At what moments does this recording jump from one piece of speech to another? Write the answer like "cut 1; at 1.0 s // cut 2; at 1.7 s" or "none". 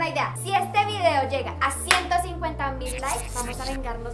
none